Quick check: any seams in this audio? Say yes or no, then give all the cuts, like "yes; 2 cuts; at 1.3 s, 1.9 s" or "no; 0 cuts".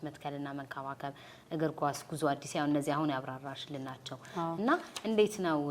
no; 0 cuts